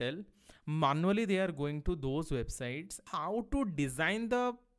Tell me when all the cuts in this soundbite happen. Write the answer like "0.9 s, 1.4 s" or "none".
2.9 s